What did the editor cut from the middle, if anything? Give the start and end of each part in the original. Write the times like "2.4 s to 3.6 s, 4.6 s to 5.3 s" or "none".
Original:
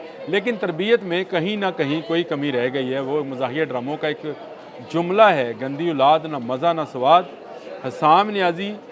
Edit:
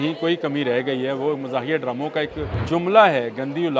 4.4 s to 4.7 s